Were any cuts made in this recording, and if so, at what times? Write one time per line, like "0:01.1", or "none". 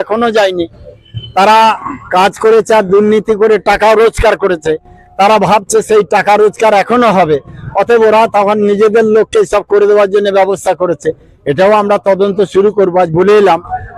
none